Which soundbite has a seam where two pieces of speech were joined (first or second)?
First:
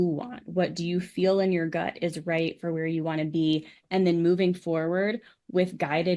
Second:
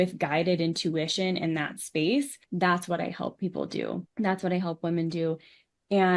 second